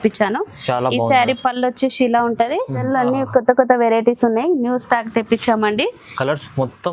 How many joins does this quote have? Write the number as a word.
one